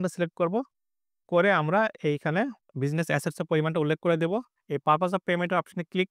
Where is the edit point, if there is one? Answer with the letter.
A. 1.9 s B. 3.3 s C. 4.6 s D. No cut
C